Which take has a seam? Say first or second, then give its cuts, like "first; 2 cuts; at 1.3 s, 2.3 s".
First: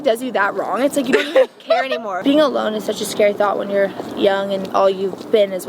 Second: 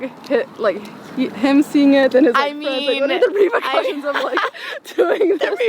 first; 1 cut; at 2.2 s